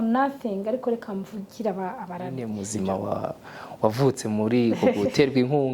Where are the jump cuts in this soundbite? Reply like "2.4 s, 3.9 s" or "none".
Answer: 2.5 s